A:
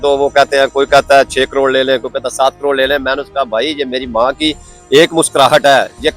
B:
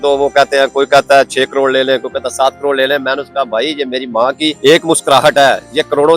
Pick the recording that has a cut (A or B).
B